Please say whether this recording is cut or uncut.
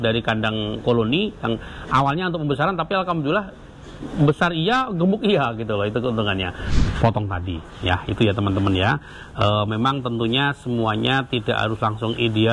cut